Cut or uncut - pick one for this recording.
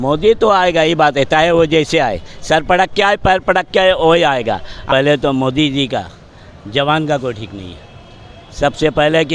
cut